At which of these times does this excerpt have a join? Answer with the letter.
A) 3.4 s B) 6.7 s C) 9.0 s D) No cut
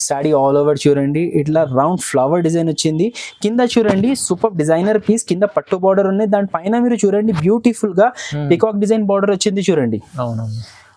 D